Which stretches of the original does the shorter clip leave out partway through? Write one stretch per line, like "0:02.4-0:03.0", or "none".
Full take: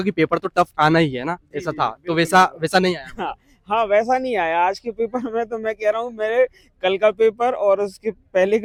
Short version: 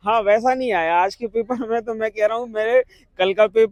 none